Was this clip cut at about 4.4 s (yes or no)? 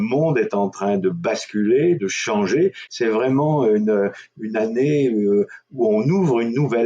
no